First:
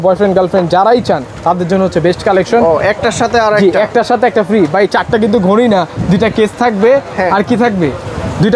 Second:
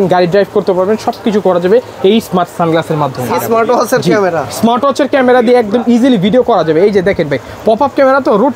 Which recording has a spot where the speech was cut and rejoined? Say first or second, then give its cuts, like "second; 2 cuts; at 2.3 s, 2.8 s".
second; 1 cut; at 3.3 s